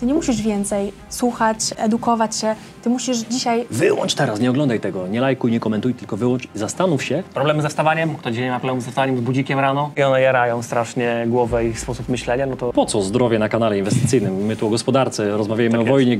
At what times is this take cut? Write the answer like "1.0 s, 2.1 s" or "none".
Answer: 1.7 s, 3.7 s, 7.3 s, 9.9 s, 12.7 s